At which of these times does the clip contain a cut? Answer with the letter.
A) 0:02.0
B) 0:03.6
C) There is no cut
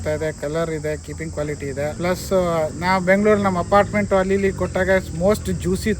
A